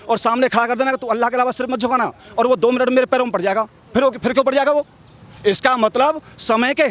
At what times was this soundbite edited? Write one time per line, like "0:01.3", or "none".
none